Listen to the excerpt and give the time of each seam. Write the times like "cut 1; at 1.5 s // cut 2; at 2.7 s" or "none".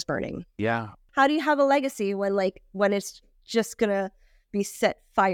cut 1; at 1.0 s